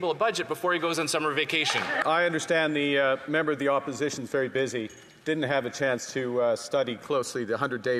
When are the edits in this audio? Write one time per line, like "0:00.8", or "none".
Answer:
0:02.0